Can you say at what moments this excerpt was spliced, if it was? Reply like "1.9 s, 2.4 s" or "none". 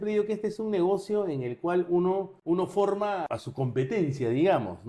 2.3 s